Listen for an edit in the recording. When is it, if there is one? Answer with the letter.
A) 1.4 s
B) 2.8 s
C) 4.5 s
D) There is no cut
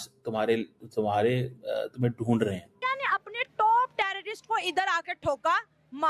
D